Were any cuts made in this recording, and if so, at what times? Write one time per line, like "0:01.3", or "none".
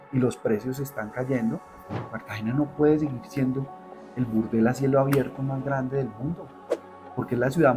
0:02.2